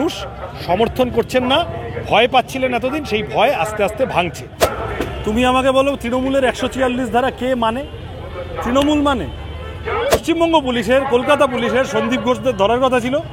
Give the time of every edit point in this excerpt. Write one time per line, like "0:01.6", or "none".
0:04.5
0:10.1